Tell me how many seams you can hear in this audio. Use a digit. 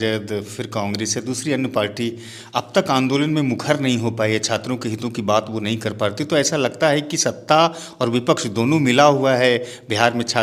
0